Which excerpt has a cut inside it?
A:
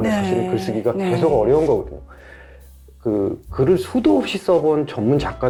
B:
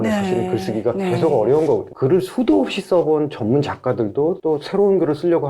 B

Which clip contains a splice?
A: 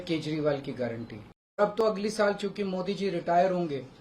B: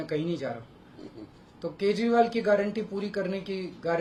A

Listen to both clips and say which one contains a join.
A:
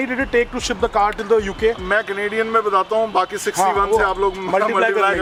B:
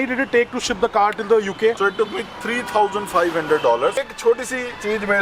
B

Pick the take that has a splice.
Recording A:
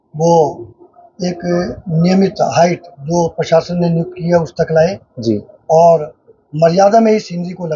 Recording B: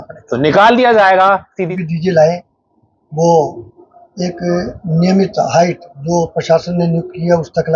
B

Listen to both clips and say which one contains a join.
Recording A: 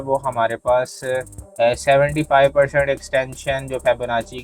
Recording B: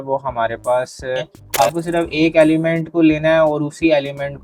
B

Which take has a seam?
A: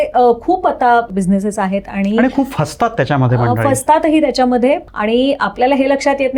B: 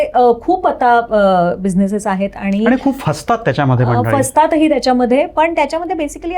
A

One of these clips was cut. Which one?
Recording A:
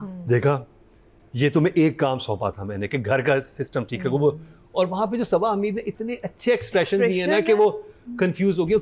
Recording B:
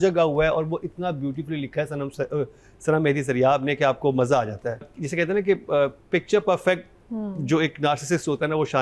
B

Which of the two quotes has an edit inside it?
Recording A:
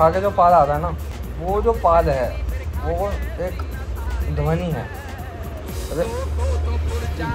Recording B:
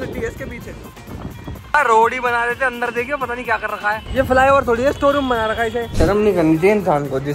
B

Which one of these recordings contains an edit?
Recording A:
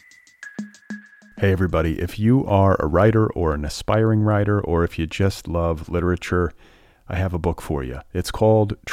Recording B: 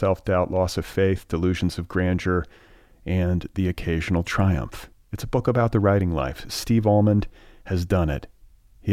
A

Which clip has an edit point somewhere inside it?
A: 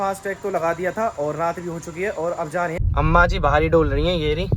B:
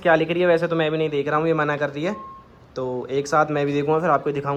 A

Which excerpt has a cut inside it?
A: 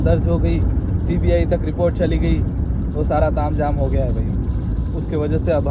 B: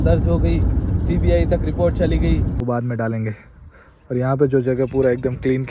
B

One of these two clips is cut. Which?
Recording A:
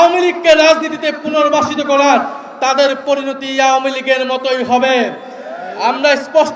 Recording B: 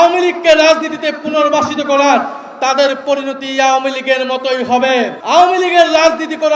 B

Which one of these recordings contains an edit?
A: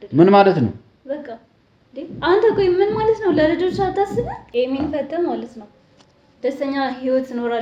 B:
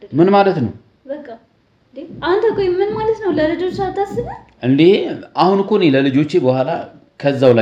A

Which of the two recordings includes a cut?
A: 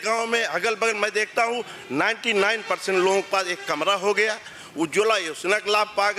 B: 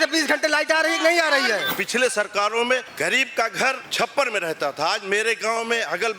B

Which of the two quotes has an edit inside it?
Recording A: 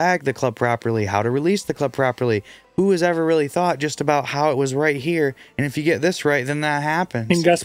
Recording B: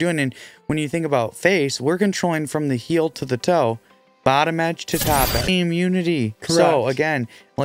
B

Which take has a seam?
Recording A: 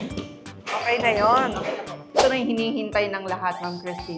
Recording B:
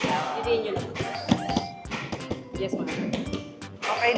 A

